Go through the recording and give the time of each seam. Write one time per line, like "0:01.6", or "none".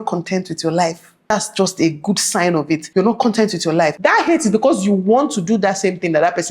0:04.0